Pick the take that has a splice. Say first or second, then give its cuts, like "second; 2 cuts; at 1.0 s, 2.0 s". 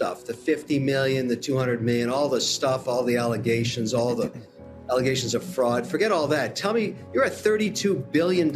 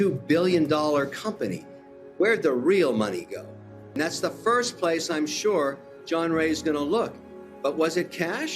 second; 1 cut; at 3.9 s